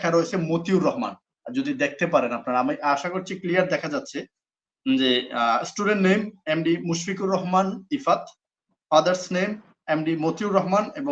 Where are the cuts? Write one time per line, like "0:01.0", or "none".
none